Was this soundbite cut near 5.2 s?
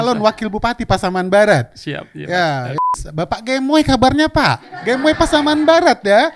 no; 1 cut; at 3.0 s

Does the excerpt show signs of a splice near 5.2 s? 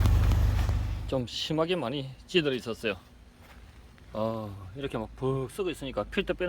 no; 1 cut; at 0.9 s

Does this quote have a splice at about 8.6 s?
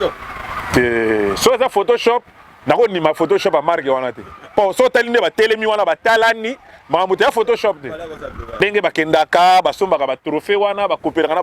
yes; 1 cut; at 8.6 s

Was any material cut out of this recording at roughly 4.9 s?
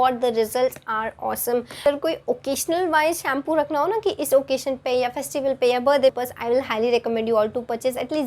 no; 2 cuts; at 1.9 s, 6.2 s

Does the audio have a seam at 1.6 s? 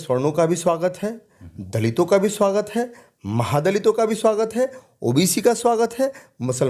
no; 0 cuts

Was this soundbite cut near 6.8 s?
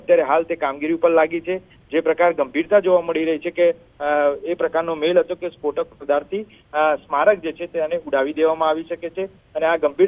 yes; 1 cut; at 6.8 s

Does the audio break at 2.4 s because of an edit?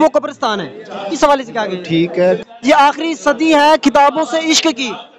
yes; 1 cut; at 2.4 s

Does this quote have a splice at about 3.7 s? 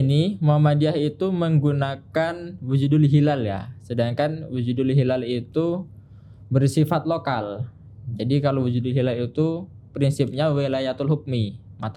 no; 0 cuts

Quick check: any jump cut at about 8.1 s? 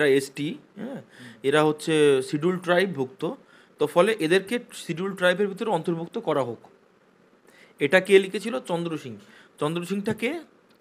no; 0 cuts

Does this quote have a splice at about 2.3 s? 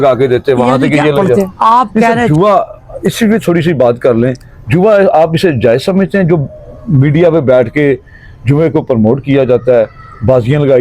yes; 1 cut; at 2.3 s

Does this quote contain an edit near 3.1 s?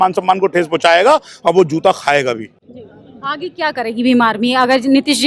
no; 0 cuts

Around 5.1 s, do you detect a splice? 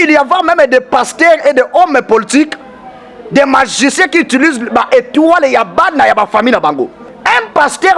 no; 1 cut; at 7.1 s

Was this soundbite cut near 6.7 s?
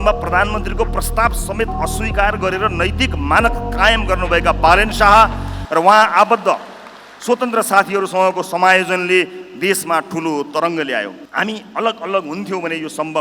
no; 1 cut; at 11.2 s

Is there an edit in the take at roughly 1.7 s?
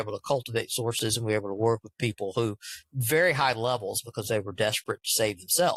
no; 0 cuts

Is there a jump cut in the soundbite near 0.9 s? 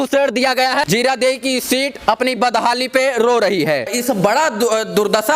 yes; 2 cuts; at 0.9 s, 4.0 s

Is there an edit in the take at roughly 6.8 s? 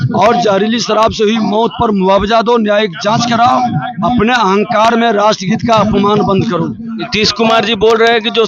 yes; 1 cut; at 6.8 s

